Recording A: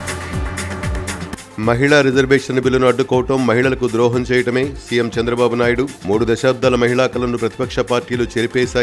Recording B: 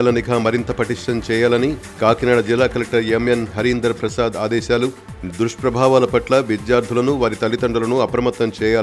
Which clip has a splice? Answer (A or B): A